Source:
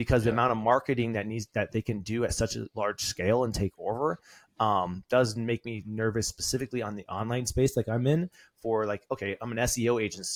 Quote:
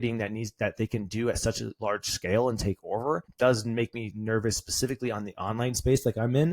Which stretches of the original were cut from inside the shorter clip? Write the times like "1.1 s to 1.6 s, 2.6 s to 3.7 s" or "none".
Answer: 4.2 s to 5.0 s